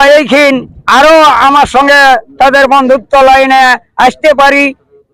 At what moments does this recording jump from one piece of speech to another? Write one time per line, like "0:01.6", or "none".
none

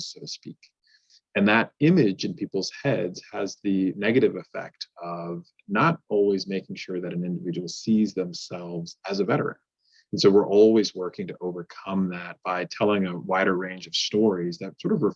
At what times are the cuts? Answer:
none

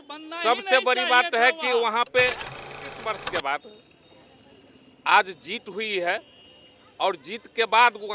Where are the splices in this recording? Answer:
0:02.9

